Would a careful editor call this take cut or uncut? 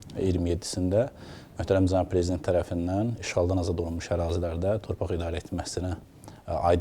uncut